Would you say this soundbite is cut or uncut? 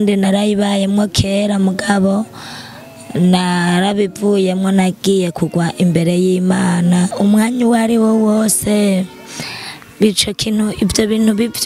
cut